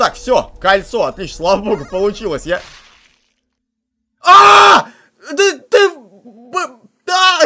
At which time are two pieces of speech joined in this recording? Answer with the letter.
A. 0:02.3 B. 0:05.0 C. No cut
C